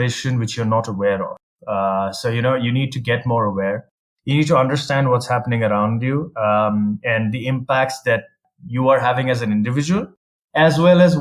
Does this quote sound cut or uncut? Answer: uncut